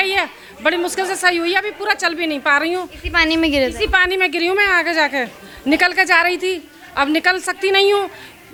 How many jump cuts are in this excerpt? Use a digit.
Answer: 0